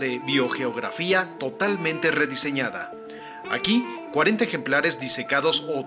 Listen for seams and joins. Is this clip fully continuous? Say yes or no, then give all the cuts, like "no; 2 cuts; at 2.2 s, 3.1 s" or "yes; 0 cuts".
no; 1 cut; at 4.8 s